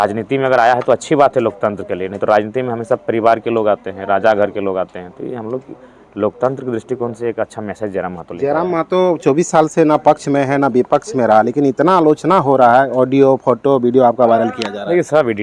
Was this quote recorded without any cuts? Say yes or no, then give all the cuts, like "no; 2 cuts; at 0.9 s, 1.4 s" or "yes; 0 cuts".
yes; 0 cuts